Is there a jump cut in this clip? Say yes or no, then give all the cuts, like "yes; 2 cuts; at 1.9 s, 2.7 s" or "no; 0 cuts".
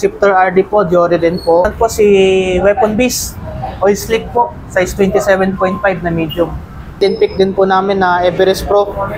yes; 2 cuts; at 1.7 s, 7.0 s